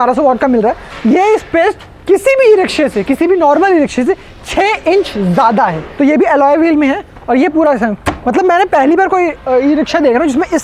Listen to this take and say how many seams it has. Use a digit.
2